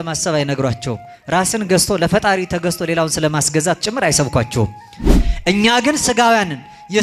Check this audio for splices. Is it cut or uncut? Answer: cut